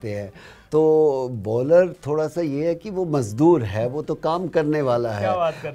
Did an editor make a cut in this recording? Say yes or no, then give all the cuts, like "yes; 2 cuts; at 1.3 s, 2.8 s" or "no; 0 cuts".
no; 0 cuts